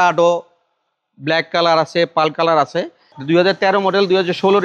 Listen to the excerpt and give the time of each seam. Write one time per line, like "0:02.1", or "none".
0:03.1